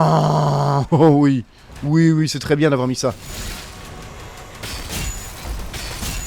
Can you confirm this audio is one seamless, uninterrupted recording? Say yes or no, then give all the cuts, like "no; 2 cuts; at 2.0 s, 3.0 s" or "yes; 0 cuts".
yes; 0 cuts